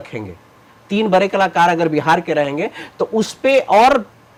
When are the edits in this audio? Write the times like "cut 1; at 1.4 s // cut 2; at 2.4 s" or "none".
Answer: none